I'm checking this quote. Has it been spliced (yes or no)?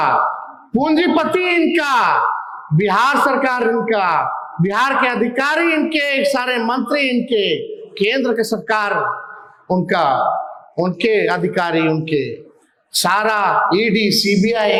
no